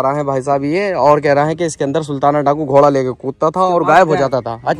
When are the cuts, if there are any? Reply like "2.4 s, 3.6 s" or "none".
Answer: none